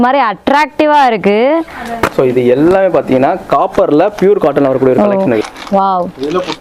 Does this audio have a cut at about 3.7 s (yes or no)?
no